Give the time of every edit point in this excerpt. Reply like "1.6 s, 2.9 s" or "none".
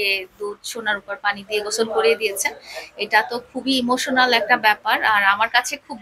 none